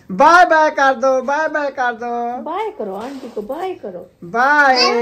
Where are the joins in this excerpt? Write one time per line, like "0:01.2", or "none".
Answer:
none